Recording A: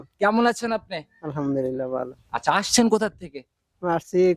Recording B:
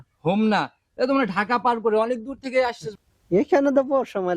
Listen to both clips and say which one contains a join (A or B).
B